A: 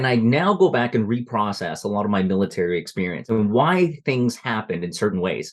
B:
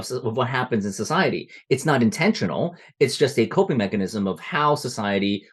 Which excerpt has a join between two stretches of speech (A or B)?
A